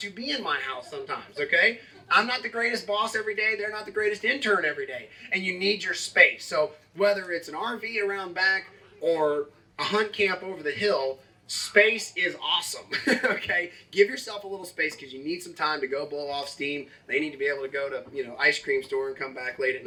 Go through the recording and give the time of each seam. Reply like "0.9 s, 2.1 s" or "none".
none